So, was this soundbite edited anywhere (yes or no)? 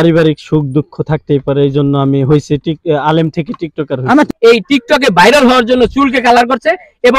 yes